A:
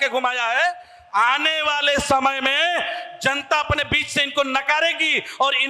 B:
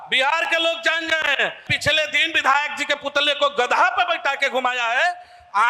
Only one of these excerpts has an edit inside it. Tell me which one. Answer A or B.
B